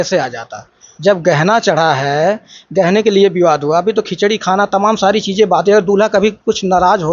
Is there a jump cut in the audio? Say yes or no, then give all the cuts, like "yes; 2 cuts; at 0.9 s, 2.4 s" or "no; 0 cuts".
no; 0 cuts